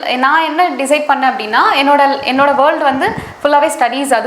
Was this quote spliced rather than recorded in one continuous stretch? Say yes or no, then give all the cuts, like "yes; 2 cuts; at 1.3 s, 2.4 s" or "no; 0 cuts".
no; 0 cuts